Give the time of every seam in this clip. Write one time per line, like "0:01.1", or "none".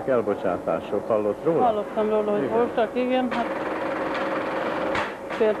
none